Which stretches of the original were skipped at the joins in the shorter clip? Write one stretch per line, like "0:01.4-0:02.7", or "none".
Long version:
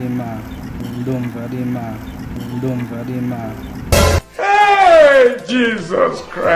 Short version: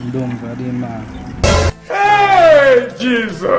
0:02.3-0:03.9

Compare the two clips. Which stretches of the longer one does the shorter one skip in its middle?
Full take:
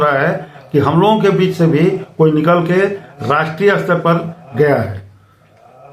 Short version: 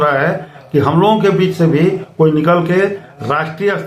none

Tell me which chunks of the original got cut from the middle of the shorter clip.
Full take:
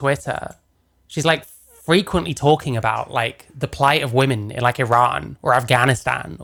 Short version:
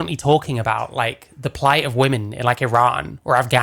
none

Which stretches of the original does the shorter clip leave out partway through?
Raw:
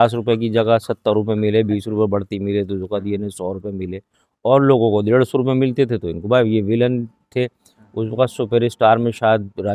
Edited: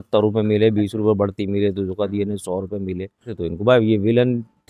0:04.3-0:06.0

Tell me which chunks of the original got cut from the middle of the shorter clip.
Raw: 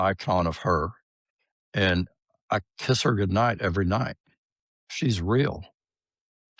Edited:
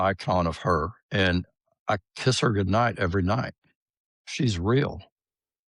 0:01.0-0:01.6

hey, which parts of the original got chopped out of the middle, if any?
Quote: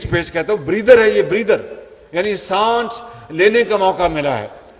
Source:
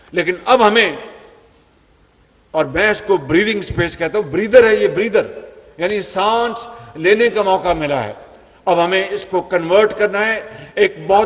none

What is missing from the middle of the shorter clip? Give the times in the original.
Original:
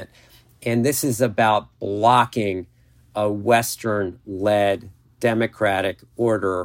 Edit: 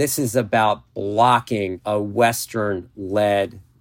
0:02.6-0:03.1

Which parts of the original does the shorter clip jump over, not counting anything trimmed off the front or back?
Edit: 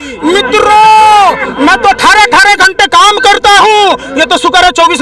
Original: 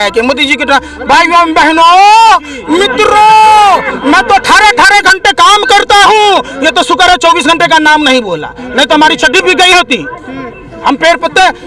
none

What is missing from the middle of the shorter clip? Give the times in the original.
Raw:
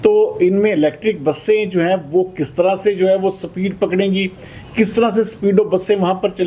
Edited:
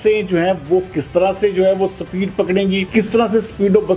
0:04.3-0:04.7

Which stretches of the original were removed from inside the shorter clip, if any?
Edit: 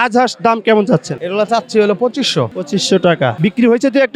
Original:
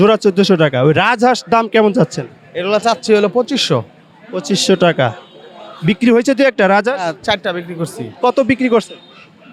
0:02.2-0:02.5
0:03.9-0:04.3
0:05.1-0:05.8

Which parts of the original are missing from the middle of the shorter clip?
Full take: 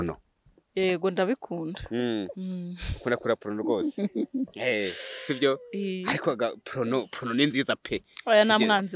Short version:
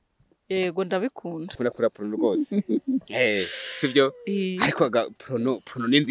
0:01.7-0:02.9

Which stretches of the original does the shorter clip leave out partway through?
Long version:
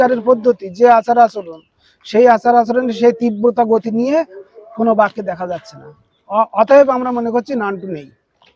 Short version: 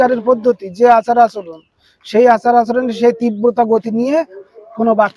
none

